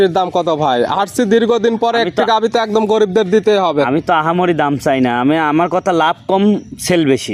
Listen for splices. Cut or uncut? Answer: uncut